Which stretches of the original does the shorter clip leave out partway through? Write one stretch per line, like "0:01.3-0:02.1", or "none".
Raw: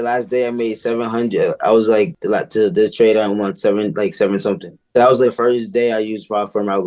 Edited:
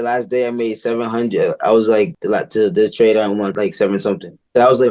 0:03.5-0:03.9

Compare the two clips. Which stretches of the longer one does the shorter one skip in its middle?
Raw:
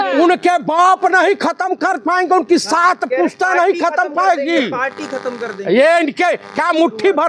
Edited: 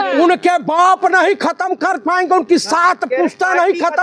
none

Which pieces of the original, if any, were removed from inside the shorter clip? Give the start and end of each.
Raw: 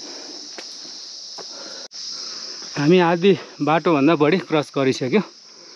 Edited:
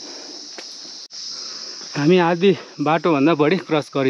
0:01.2-0:02.0

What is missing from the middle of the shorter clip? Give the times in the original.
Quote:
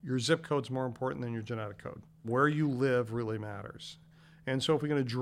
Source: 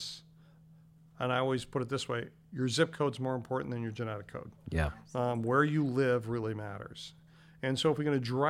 0:04.7-0:05.4

